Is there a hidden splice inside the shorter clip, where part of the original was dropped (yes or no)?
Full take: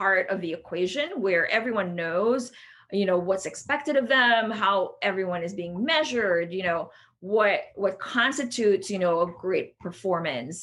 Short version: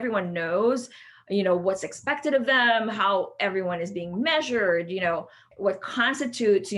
yes